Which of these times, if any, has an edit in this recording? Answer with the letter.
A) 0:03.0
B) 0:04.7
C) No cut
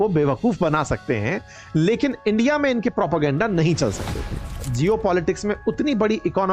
B